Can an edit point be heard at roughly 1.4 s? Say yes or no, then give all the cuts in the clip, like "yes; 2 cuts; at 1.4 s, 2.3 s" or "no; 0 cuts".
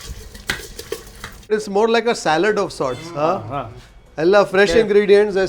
yes; 1 cut; at 1.4 s